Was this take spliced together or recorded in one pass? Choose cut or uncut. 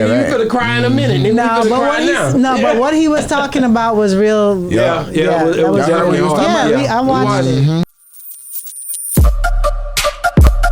cut